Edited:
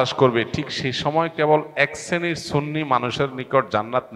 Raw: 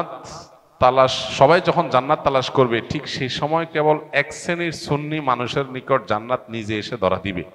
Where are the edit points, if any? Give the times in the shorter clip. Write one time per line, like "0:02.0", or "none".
none